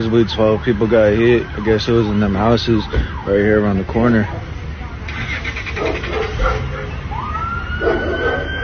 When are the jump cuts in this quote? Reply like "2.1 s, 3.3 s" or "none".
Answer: none